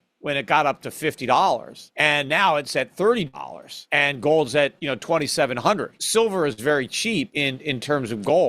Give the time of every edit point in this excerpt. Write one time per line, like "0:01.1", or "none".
0:01.8
0:05.9
0:07.3